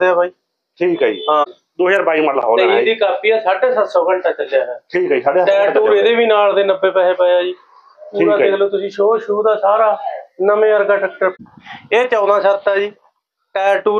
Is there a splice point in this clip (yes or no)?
yes